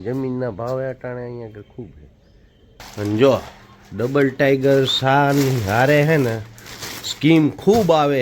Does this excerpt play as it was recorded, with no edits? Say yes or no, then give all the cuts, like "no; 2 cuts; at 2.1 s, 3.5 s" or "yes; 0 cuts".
no; 1 cut; at 2.9 s